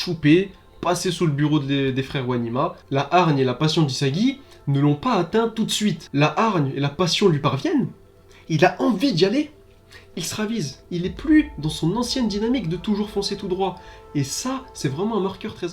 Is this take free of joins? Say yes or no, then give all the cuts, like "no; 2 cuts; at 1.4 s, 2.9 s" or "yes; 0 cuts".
no; 3 cuts; at 2.8 s, 6.0 s, 10.8 s